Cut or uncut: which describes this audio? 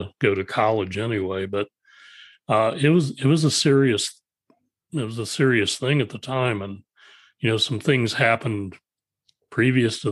uncut